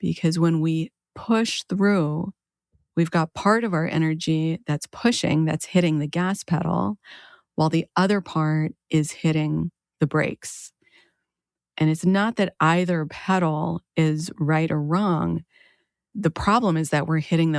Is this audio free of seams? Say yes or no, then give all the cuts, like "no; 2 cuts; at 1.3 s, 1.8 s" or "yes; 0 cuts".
no; 1 cut; at 16.1 s